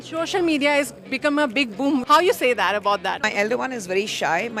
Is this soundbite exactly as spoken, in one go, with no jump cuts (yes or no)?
no